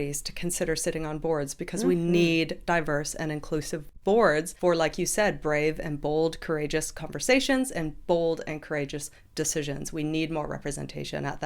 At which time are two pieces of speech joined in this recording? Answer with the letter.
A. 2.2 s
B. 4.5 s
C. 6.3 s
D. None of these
B